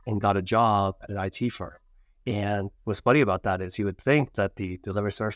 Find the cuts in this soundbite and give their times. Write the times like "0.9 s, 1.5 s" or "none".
none